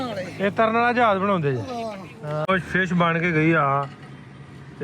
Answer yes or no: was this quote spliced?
yes